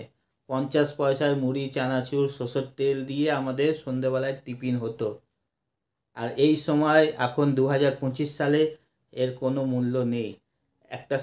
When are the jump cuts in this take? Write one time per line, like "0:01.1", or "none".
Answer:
none